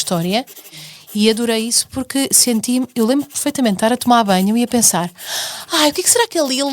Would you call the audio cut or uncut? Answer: cut